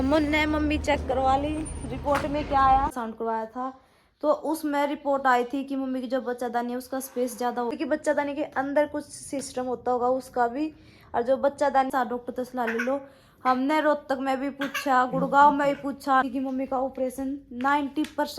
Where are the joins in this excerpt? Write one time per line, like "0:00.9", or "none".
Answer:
0:02.9
0:07.7
0:11.9
0:16.2